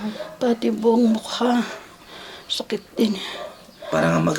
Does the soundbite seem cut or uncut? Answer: uncut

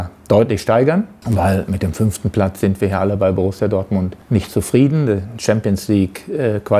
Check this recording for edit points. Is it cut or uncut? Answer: cut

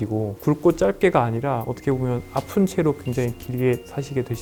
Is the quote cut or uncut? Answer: uncut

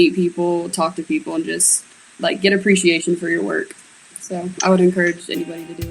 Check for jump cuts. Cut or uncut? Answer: uncut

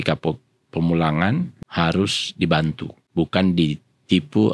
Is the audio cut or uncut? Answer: cut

